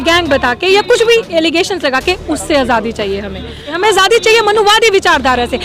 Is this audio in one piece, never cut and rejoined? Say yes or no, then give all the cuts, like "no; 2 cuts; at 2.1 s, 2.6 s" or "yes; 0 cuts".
no; 1 cut; at 3.7 s